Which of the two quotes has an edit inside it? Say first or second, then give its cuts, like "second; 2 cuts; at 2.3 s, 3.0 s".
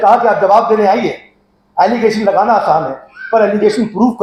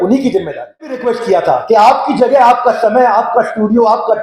second; 1 cut; at 1.0 s